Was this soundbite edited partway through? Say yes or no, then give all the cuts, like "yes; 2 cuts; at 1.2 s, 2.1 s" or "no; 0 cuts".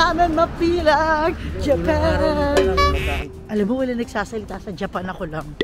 yes; 1 cut; at 3.3 s